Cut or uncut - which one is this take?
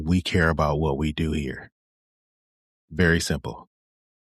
uncut